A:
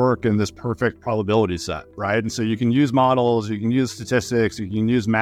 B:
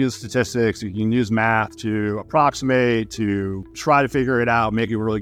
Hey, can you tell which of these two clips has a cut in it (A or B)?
B